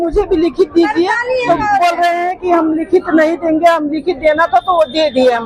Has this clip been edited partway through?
no; 0 cuts

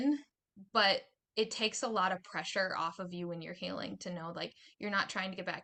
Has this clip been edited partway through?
no; 0 cuts

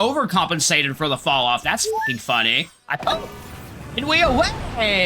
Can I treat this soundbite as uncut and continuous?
no; 1 cut; at 2.8 s

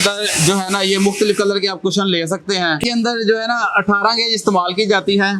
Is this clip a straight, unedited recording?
no; 1 cut; at 2.8 s

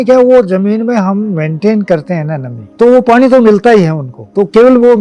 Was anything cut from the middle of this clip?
no; 0 cuts

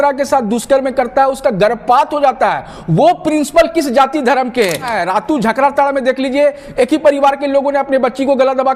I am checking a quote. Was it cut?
yes; 1 cut; at 4.9 s

